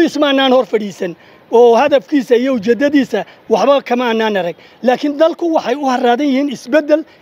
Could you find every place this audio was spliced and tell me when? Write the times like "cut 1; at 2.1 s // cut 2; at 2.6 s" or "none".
none